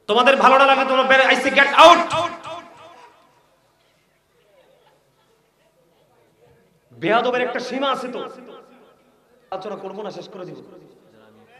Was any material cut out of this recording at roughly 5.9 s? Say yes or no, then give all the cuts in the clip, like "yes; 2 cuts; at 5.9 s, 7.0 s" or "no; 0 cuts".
no; 1 cut; at 9.5 s